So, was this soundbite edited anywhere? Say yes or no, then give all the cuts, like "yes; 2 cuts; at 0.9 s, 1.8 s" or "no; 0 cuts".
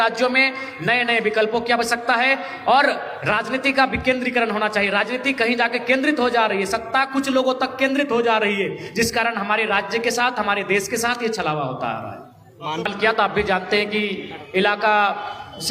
yes; 1 cut; at 12.8 s